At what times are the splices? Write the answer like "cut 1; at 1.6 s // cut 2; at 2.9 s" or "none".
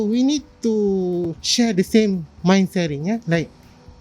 cut 1; at 1.4 s